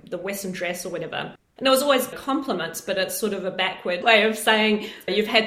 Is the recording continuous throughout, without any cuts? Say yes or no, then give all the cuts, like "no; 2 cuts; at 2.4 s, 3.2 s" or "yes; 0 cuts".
no; 1 cut; at 4.0 s